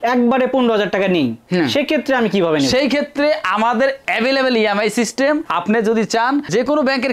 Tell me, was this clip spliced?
no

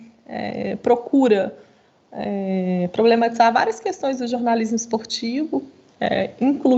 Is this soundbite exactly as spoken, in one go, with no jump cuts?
yes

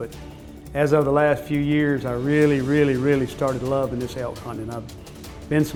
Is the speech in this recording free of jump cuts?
yes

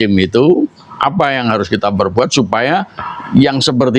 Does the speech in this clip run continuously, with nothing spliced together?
yes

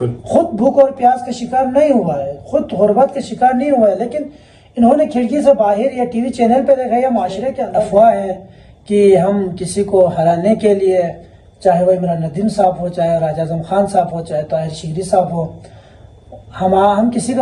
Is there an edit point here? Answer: yes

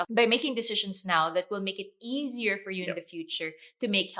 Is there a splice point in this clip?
no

